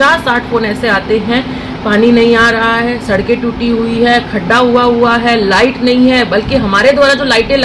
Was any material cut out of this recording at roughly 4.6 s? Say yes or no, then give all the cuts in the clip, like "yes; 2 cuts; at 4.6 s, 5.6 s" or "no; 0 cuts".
no; 0 cuts